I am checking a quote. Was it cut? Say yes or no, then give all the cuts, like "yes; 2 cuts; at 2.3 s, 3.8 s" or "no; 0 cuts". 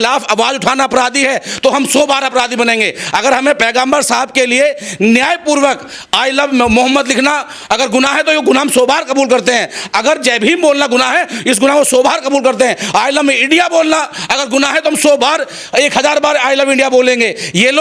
no; 0 cuts